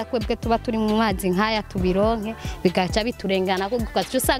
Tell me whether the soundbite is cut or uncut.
uncut